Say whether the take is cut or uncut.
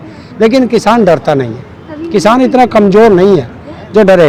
uncut